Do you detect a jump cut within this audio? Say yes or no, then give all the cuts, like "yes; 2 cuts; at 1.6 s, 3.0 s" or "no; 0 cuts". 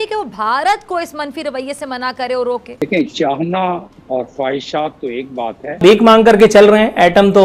yes; 2 cuts; at 2.8 s, 5.8 s